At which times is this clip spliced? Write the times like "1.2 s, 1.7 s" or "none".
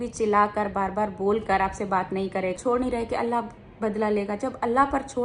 2.6 s